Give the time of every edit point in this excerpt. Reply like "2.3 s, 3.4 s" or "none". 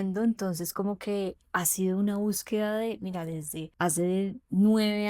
3.6 s